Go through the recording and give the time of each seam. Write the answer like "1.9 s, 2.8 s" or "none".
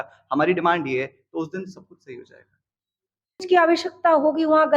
3.4 s